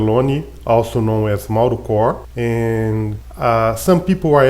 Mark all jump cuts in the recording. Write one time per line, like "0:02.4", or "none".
0:02.3
0:03.2